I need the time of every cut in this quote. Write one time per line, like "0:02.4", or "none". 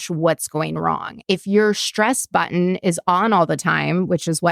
0:01.2